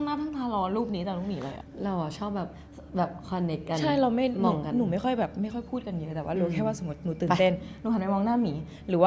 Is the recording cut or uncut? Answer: cut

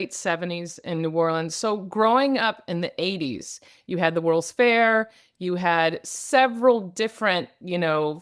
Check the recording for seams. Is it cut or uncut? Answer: uncut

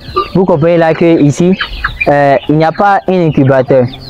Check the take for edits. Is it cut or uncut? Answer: uncut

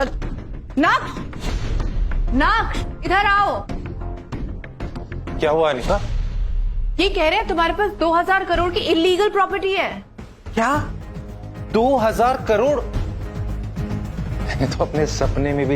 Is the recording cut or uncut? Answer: cut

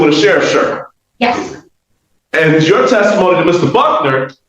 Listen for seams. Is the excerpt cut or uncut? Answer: uncut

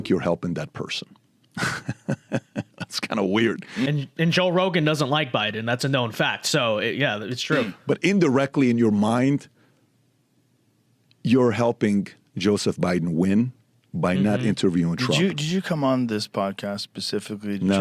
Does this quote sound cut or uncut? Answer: uncut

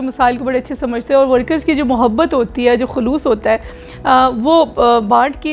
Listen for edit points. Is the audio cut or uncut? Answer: uncut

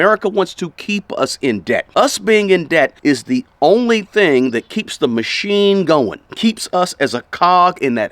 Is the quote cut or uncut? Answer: cut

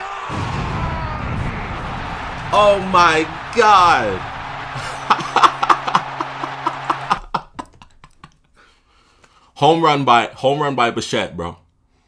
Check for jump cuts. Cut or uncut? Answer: uncut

